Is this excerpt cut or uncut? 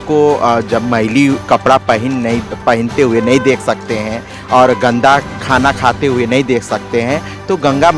uncut